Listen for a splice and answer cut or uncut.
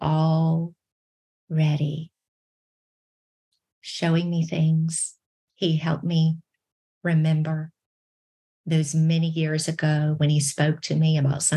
uncut